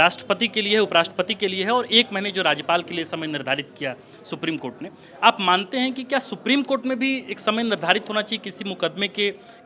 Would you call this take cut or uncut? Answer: uncut